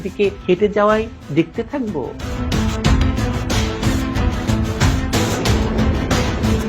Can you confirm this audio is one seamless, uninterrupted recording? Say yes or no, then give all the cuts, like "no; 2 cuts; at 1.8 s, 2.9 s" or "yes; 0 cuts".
no; 1 cut; at 2.2 s